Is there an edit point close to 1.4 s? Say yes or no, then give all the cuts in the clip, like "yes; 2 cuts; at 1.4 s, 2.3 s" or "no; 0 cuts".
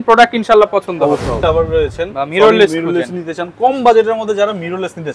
yes; 1 cut; at 1.4 s